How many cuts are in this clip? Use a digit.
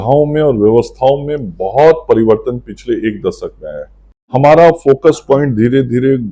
1